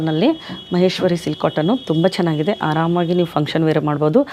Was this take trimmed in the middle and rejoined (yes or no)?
no